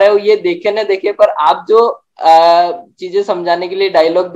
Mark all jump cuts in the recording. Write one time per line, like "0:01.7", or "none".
none